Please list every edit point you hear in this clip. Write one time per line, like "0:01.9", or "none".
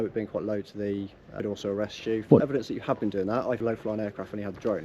0:01.3
0:02.4
0:03.6